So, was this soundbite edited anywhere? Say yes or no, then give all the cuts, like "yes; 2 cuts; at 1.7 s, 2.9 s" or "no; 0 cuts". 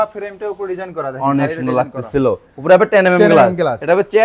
no; 0 cuts